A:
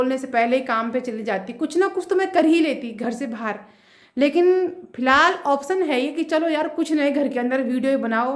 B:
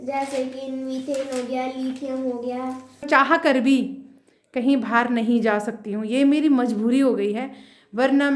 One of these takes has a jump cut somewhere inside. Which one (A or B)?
B